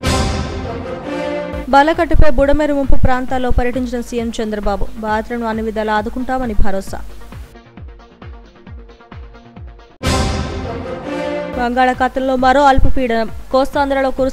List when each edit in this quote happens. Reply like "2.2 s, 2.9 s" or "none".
1.4 s